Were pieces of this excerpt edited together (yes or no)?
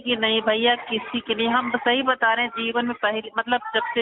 no